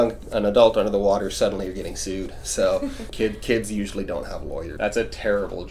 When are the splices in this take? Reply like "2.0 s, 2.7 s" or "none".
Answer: 3.1 s, 4.7 s